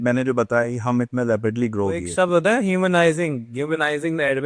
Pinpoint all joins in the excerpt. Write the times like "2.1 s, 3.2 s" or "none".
2.1 s